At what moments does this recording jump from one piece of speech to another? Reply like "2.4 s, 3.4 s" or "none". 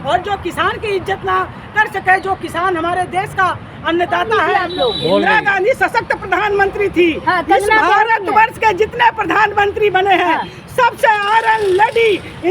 4.5 s